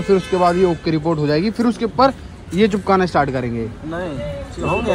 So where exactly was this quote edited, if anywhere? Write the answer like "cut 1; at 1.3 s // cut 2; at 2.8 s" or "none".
none

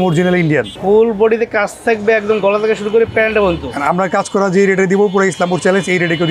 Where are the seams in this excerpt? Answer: none

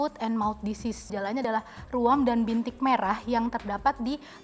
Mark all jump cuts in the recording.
cut 1; at 1.3 s

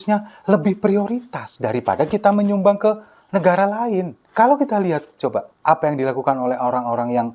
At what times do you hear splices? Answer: cut 1; at 4.2 s // cut 2; at 5.5 s

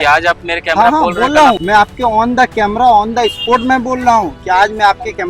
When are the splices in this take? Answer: cut 1; at 1.6 s

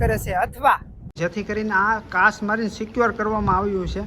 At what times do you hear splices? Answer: cut 1; at 1.0 s

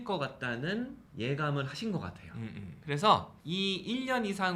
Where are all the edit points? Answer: cut 1; at 1.0 s // cut 2; at 3.4 s

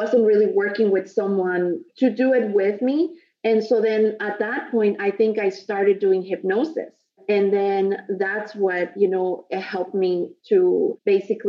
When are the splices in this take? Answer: none

